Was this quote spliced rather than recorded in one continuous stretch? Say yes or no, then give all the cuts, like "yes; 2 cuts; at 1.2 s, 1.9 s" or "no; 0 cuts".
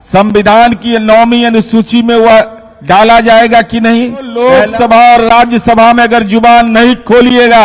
yes; 1 cut; at 4.4 s